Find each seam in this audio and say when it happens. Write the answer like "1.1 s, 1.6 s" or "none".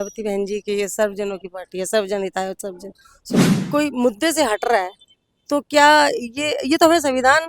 3.5 s